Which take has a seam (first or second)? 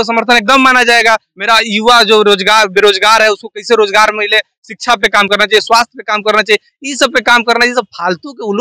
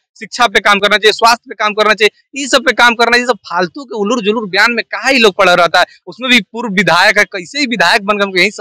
first